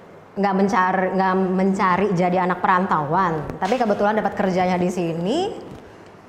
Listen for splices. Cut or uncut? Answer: uncut